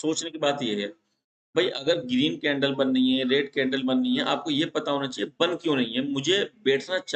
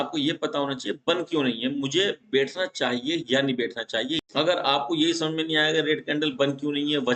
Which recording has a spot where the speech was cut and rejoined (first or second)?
second